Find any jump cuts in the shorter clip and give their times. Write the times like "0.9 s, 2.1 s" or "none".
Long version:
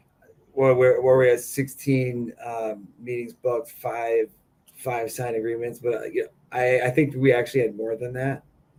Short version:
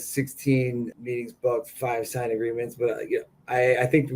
1.0 s, 1.7 s